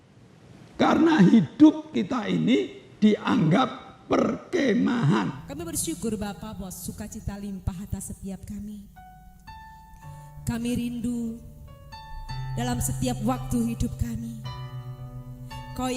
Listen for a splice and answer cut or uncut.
cut